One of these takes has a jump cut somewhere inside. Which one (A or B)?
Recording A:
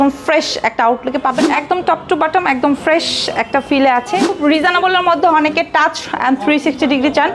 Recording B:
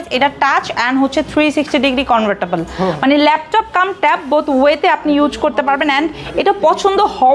A